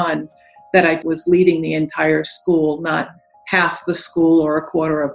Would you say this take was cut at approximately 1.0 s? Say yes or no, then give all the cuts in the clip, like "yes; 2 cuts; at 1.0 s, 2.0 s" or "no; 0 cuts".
yes; 1 cut; at 1.0 s